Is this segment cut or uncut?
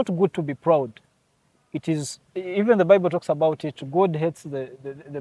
uncut